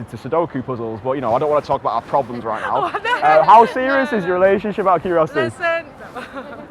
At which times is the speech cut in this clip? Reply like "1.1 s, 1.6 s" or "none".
none